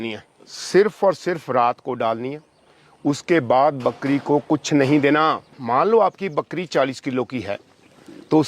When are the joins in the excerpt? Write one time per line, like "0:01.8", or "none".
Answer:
0:05.5